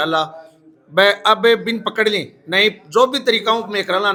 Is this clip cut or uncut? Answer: uncut